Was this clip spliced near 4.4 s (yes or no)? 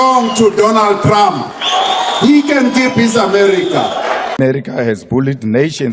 yes